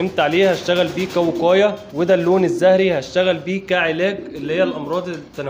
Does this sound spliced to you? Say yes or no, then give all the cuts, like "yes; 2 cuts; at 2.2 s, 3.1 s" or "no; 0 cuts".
yes; 1 cut; at 1.9 s